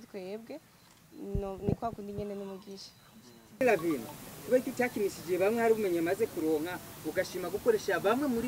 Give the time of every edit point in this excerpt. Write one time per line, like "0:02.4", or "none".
none